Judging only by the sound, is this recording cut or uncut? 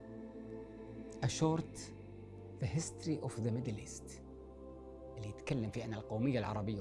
cut